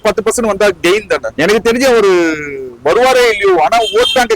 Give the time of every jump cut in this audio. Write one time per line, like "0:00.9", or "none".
none